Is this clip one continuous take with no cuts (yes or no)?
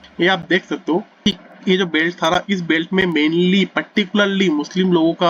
yes